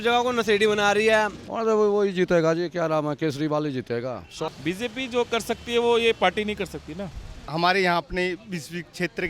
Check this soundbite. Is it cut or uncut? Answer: cut